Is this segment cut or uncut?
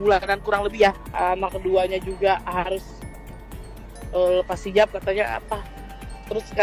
uncut